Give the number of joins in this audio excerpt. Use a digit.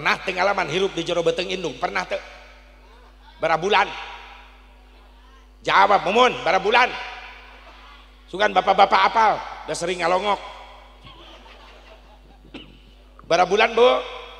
0